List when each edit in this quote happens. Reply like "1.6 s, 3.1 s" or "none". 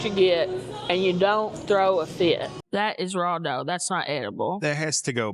2.6 s